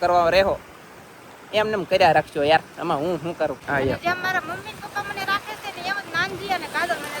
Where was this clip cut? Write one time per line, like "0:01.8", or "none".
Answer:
0:03.6